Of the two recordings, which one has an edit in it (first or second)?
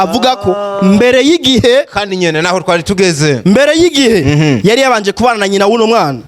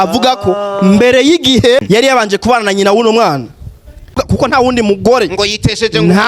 second